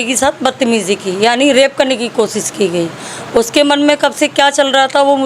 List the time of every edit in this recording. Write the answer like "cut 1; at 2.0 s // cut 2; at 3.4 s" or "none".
none